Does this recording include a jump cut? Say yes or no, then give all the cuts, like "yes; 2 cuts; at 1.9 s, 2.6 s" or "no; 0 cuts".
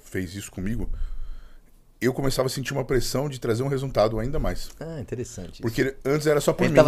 no; 0 cuts